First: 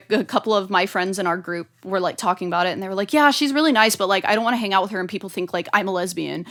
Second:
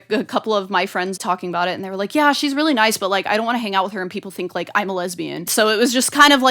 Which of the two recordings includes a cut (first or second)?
second